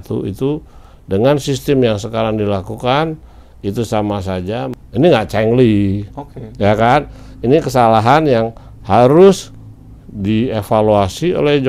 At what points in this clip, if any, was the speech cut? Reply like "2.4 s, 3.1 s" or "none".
4.7 s